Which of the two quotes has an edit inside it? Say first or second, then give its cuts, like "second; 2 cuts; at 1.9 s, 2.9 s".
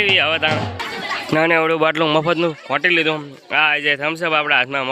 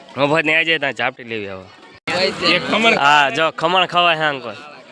second; 1 cut; at 2.1 s